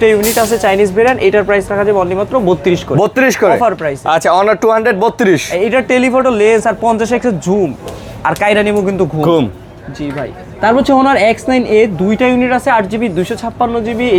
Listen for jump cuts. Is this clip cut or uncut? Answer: uncut